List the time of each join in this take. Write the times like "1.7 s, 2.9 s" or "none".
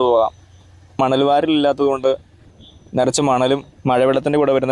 1.0 s